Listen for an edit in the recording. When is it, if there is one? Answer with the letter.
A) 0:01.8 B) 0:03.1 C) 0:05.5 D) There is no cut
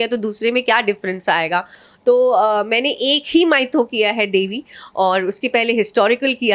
D